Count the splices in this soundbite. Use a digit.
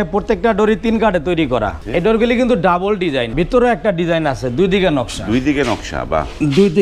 2